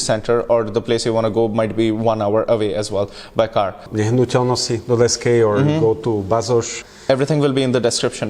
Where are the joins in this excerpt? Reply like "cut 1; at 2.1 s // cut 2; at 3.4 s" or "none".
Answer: cut 1; at 3.8 s // cut 2; at 6.8 s